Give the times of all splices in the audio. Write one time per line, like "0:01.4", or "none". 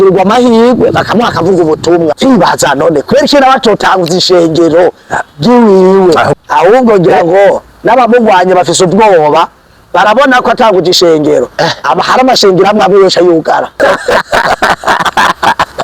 0:02.2
0:06.3
0:13.8